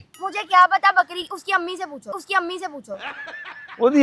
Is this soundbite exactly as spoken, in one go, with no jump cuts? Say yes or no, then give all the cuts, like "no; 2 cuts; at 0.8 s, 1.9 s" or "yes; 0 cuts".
yes; 0 cuts